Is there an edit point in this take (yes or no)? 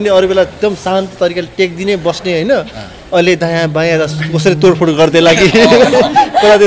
no